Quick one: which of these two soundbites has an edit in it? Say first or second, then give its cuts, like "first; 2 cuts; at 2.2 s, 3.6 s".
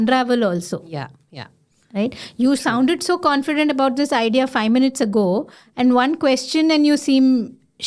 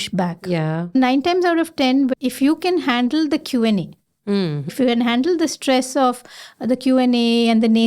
second; 3 cuts; at 0.8 s, 2.1 s, 4.7 s